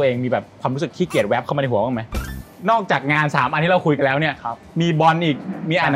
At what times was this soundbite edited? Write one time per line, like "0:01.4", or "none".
0:02.3